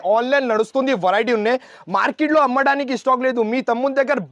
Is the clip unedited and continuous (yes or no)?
yes